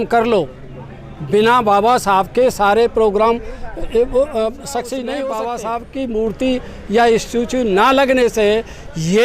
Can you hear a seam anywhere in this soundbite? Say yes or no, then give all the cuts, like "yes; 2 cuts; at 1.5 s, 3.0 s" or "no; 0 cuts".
yes; 1 cut; at 5.2 s